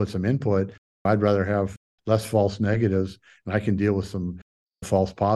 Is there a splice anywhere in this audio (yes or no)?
no